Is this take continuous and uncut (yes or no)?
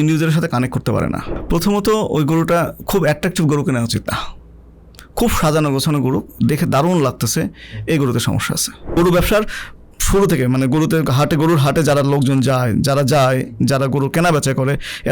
no